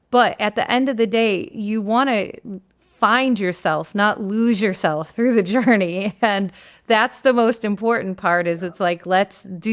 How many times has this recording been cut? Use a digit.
0